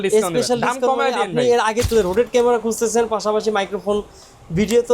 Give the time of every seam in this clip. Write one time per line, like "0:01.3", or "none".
0:01.9